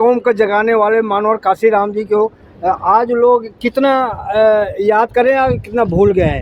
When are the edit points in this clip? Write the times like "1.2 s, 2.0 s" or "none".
none